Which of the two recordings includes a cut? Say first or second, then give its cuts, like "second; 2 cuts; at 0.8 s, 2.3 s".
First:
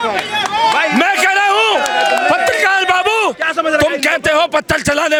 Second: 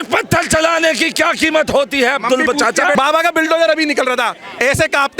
second; 1 cut; at 2.9 s